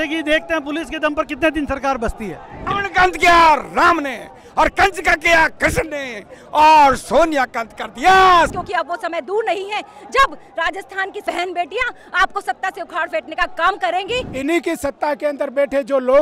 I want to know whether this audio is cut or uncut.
cut